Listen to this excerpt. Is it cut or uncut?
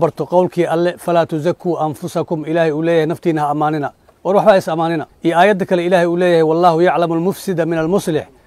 cut